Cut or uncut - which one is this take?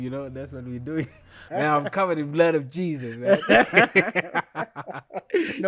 cut